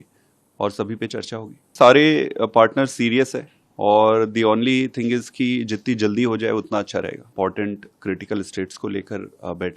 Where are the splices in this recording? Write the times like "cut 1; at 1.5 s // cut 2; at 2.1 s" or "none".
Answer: cut 1; at 1.7 s // cut 2; at 7.3 s

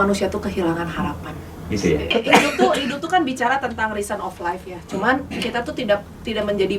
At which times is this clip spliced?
cut 1; at 2.1 s

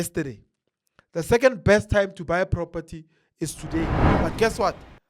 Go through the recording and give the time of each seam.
cut 1; at 4.0 s

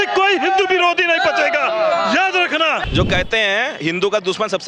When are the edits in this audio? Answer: cut 1; at 2.9 s

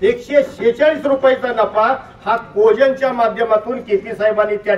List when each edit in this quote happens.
none

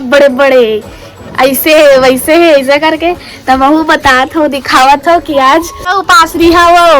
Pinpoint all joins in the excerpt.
cut 1; at 6.0 s

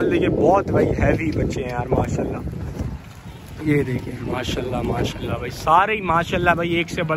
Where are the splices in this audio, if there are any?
none

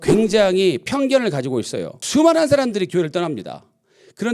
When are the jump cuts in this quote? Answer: cut 1; at 2.2 s

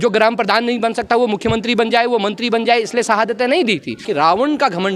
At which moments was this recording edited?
cut 1; at 4.1 s

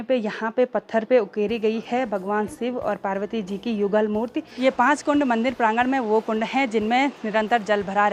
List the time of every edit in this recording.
cut 1; at 4.4 s

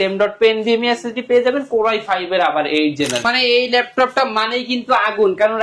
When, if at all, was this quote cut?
cut 1; at 3.2 s

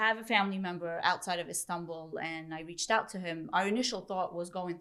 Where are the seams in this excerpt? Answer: none

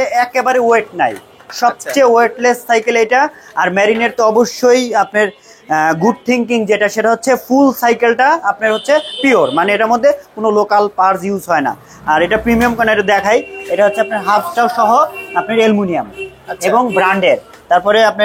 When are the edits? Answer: none

